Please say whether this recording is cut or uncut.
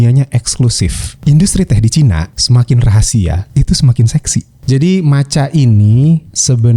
cut